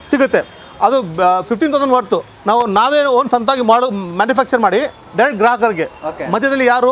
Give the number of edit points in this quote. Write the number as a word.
one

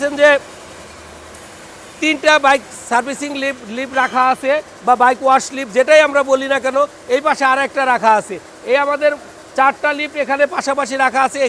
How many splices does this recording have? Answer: zero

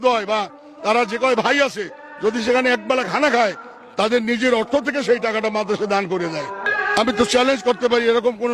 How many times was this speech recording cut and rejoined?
one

